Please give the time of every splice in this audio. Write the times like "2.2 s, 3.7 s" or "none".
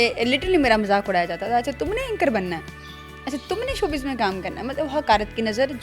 none